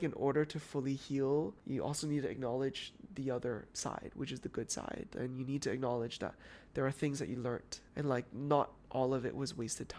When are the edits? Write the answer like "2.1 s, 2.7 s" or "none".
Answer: 1.6 s, 3.7 s, 7.8 s